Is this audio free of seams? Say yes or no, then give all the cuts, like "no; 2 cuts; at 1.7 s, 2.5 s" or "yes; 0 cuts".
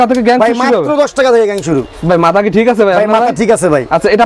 yes; 0 cuts